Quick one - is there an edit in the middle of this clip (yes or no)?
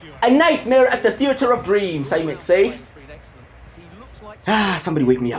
yes